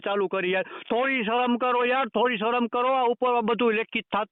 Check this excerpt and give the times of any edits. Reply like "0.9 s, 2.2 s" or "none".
none